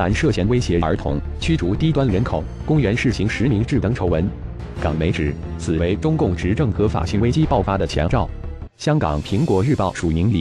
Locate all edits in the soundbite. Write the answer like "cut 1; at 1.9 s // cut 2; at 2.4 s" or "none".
none